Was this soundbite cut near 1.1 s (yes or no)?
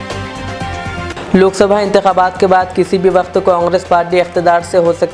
no